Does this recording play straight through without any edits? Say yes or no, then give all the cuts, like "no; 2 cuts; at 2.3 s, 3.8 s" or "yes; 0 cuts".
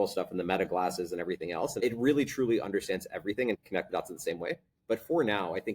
no; 2 cuts; at 1.8 s, 3.6 s